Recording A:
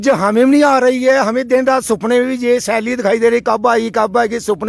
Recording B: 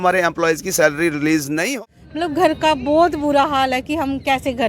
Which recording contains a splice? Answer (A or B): B